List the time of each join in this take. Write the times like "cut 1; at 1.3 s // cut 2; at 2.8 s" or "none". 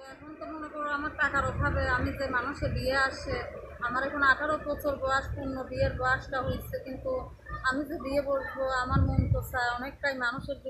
none